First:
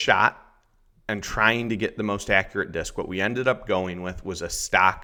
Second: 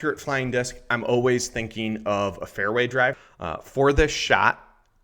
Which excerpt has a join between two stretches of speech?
second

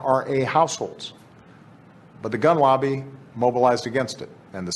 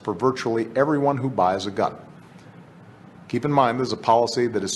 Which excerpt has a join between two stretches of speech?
second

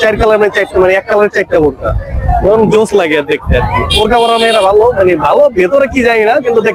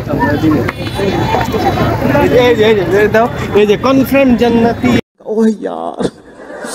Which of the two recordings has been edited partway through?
second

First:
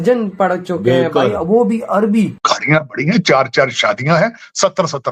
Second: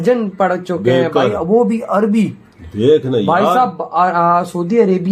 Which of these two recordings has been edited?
first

